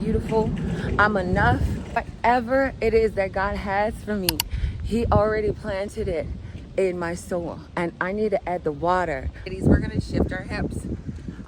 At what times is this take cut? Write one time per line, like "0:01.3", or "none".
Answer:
0:02.1
0:09.5